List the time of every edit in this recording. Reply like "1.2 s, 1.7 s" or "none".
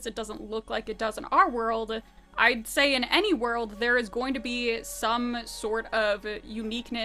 none